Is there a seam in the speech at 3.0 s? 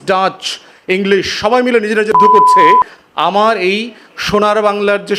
yes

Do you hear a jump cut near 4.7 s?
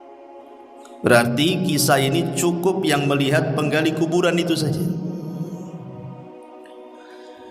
no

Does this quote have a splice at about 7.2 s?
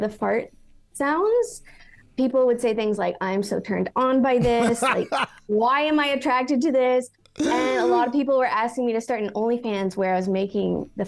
no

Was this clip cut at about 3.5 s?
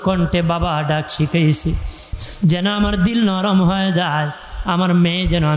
no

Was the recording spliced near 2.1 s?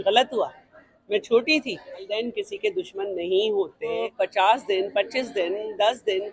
yes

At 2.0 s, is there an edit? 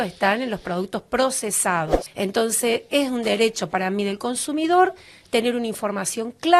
yes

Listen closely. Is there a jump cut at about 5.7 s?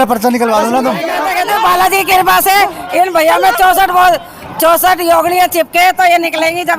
no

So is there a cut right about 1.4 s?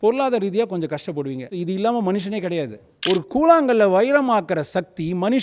no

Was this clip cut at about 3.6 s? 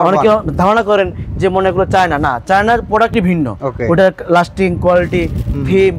yes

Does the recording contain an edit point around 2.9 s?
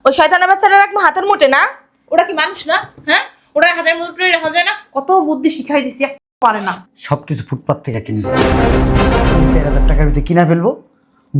no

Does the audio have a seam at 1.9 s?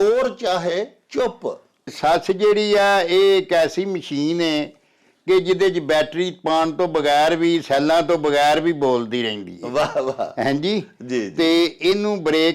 yes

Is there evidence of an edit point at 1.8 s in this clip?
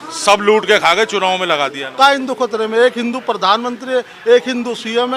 yes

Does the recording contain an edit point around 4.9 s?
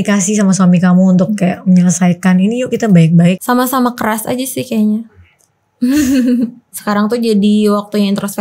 no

